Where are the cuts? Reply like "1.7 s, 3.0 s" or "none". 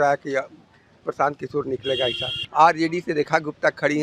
2.3 s